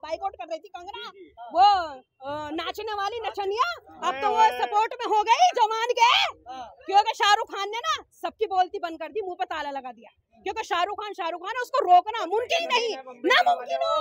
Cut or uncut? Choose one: uncut